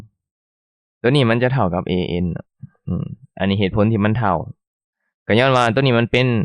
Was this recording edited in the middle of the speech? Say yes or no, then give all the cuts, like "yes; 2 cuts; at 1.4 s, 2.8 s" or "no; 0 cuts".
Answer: no; 0 cuts